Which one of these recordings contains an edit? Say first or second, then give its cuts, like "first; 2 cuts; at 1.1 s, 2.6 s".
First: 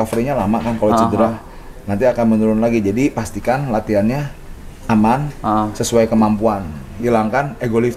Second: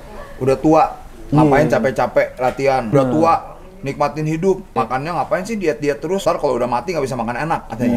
second; 3 cuts; at 2.9 s, 4.7 s, 6.2 s